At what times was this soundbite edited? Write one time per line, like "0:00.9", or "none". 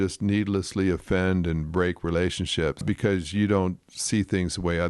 0:02.8